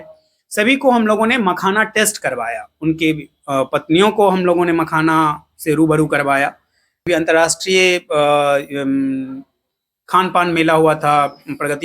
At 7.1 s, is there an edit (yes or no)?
yes